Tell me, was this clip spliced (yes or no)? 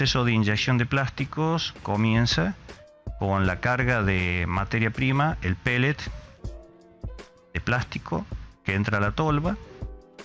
yes